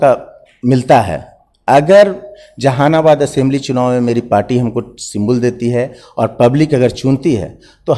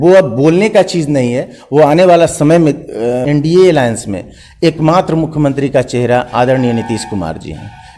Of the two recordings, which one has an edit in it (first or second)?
second